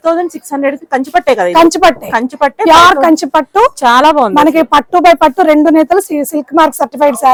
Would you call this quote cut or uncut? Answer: uncut